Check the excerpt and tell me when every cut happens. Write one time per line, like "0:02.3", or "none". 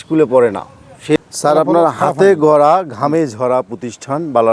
0:01.2